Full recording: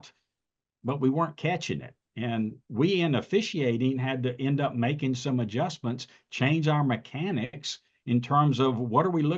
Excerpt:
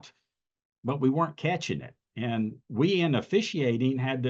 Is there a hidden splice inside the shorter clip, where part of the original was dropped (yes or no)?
no